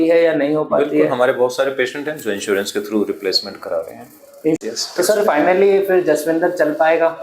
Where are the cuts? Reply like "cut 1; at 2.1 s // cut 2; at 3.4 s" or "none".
cut 1; at 4.6 s